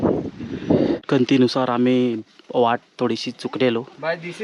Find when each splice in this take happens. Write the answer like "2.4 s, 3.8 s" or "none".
1.0 s

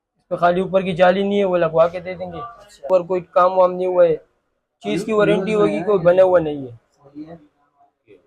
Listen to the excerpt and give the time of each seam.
2.9 s

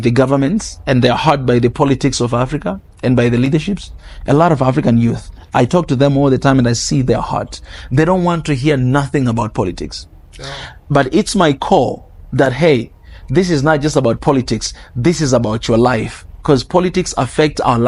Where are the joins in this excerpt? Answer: none

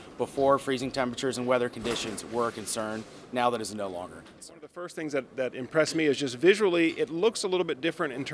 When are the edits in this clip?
4.9 s

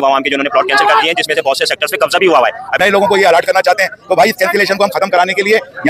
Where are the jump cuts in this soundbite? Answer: 2.8 s

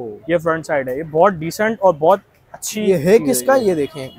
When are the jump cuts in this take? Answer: none

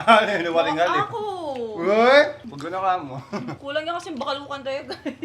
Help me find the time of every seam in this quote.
2.5 s, 3.6 s

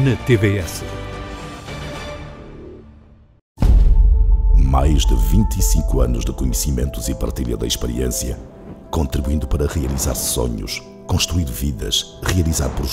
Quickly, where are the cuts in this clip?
3.5 s

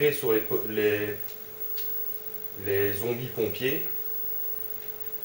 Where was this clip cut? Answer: 1.0 s

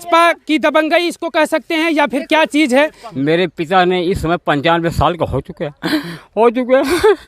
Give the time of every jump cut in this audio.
3.0 s

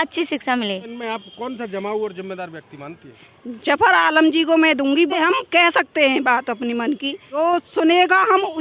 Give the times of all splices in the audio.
0.9 s, 5.1 s, 7.3 s

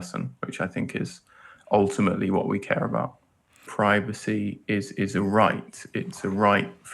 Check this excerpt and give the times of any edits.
3.6 s

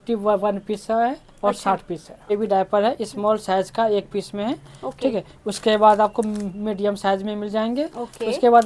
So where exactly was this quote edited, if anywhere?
2.3 s

